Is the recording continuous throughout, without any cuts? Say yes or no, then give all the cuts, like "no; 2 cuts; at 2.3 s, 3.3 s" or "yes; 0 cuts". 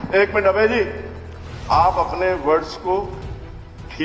yes; 0 cuts